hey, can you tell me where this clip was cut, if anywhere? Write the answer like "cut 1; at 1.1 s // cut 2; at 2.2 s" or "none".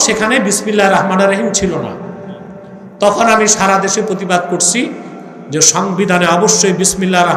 none

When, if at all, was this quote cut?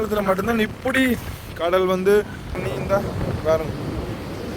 cut 1; at 2.6 s

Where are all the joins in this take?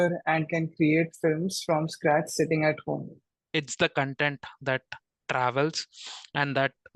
cut 1; at 3.4 s

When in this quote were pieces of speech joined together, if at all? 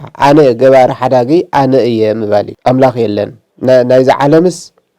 cut 1; at 2.5 s // cut 2; at 3.4 s

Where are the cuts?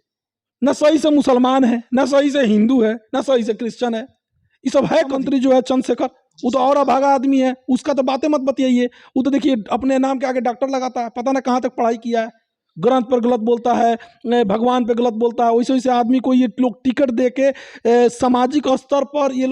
cut 1; at 5.2 s

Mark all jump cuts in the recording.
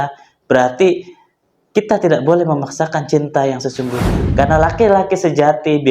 cut 1; at 4.1 s

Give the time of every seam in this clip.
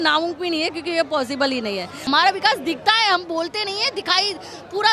cut 1; at 2.1 s

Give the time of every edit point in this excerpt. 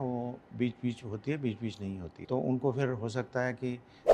cut 1; at 2.2 s

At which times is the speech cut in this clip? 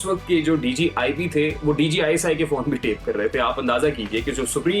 none

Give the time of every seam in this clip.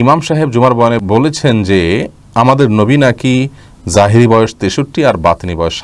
cut 1; at 1.0 s

